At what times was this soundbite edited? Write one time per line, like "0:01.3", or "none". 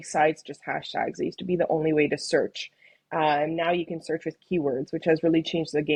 none